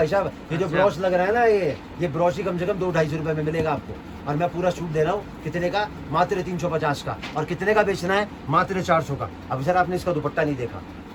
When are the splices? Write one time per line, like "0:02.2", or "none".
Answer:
none